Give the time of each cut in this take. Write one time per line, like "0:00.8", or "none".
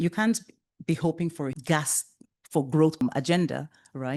0:01.6
0:03.0